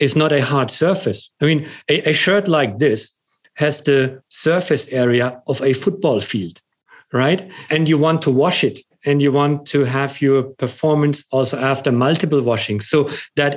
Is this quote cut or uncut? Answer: cut